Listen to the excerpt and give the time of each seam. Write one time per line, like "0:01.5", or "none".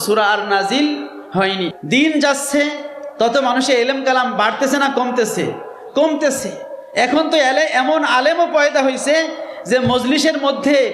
0:01.7